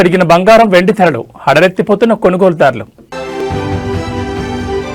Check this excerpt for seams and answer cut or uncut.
cut